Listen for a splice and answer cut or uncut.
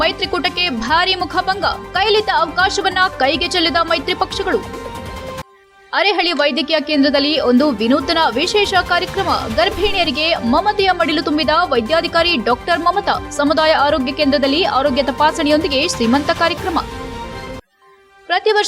uncut